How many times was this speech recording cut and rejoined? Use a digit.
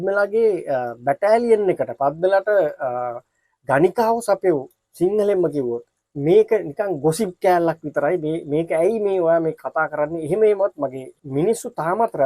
2